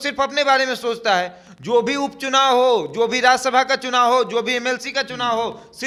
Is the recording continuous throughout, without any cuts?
yes; 0 cuts

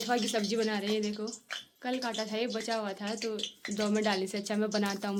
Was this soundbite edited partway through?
no; 0 cuts

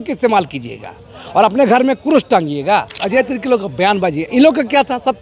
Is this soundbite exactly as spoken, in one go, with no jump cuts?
no; 1 cut; at 3.0 s

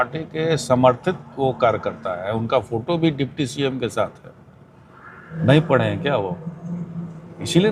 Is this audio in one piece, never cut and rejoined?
no; 1 cut; at 5.3 s

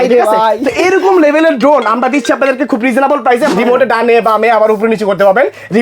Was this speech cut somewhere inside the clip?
yes; 1 cut; at 3.5 s

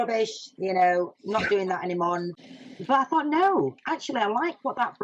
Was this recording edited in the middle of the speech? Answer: yes; 1 cut; at 2.3 s

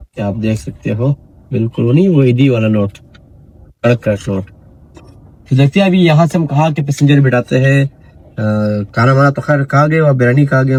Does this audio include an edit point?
no; 0 cuts

